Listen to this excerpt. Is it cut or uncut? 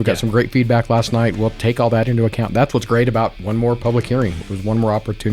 cut